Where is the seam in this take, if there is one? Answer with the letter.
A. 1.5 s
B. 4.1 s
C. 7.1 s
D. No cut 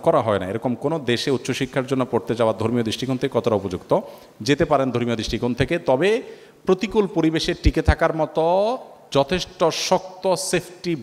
D